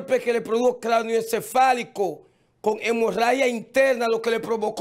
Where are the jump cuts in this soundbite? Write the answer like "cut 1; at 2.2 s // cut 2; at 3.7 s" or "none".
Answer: none